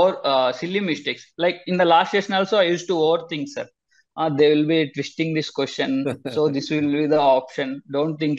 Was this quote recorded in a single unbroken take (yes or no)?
yes